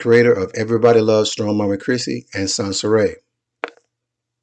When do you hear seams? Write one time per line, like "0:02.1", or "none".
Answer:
0:01.0